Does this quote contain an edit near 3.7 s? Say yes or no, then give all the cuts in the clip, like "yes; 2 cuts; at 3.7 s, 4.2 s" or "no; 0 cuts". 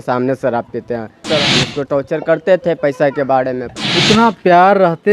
yes; 2 cuts; at 1.3 s, 3.7 s